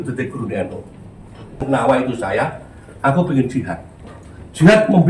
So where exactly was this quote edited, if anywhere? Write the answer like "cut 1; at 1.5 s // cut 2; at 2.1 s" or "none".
cut 1; at 1.6 s